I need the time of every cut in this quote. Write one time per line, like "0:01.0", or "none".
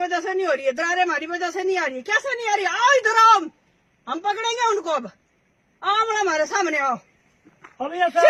none